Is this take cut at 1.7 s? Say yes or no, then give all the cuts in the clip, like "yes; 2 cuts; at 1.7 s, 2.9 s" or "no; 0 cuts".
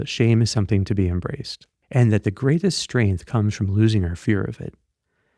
yes; 1 cut; at 1.7 s